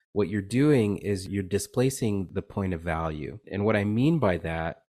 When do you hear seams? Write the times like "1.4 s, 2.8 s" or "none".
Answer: 1.3 s, 2.3 s, 3.5 s